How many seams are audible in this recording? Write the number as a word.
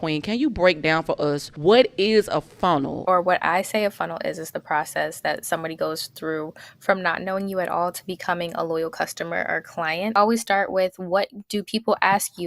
three